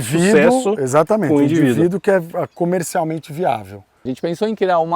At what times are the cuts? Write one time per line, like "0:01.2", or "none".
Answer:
0:04.0